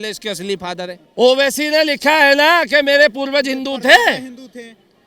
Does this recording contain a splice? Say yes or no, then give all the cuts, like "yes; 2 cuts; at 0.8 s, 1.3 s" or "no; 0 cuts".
yes; 1 cut; at 1.0 s